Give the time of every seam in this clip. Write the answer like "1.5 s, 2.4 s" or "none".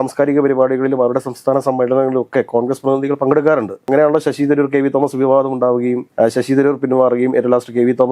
none

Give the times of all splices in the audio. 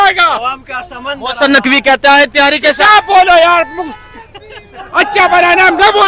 none

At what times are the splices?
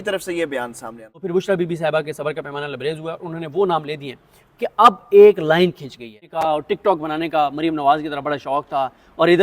1.2 s, 6.3 s

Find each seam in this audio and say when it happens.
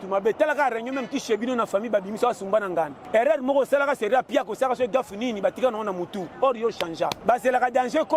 3.0 s, 7.2 s

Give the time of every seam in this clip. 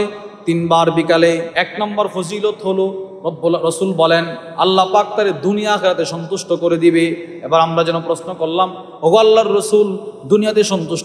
1.5 s

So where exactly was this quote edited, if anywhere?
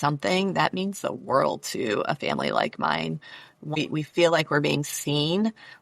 3.7 s

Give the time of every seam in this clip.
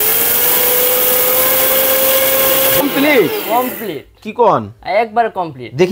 2.8 s

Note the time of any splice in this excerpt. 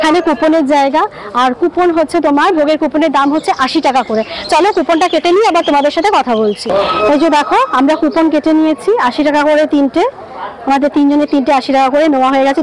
none

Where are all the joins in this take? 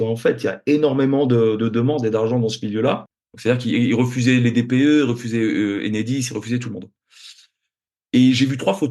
3.2 s

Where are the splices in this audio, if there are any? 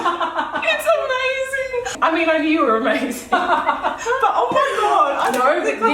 1.9 s

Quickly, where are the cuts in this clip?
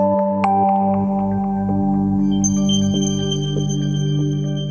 none

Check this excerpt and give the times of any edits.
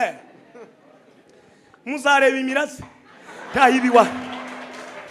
none

